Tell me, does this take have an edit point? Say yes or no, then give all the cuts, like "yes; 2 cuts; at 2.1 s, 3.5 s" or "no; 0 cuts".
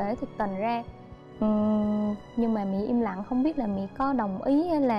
no; 0 cuts